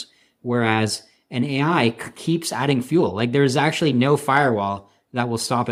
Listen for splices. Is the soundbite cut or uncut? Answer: uncut